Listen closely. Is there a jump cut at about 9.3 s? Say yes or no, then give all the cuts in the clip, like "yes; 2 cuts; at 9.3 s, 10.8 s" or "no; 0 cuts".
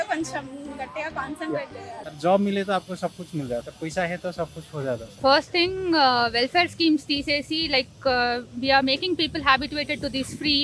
no; 2 cuts; at 2.0 s, 5.0 s